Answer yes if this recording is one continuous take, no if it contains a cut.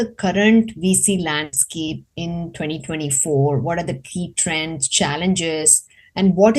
yes